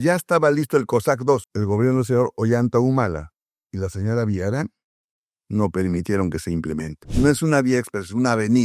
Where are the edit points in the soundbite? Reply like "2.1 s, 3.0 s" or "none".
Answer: 1.5 s, 7.0 s